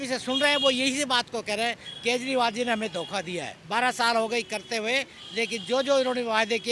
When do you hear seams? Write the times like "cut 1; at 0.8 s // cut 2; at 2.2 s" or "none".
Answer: cut 1; at 3.5 s